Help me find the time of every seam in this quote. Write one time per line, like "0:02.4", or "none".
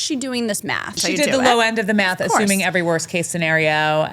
0:01.0